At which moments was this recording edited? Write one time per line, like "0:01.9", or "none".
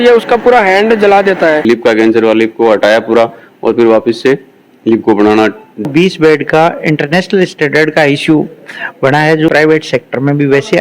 0:01.6
0:05.9
0:09.5